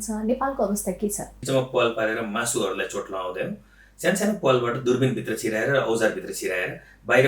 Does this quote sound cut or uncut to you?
cut